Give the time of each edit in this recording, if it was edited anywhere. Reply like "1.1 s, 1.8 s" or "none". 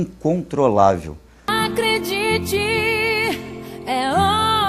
1.5 s